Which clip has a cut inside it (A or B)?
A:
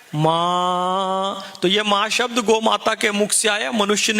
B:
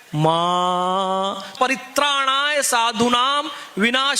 B